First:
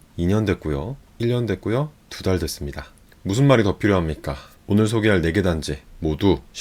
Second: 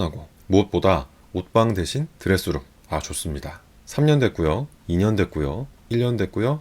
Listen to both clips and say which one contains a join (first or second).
second